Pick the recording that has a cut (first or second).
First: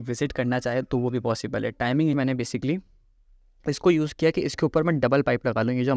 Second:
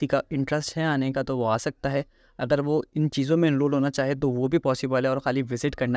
first